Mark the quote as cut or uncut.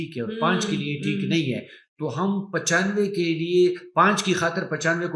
uncut